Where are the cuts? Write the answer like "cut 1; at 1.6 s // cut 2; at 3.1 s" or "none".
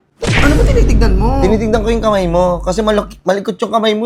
none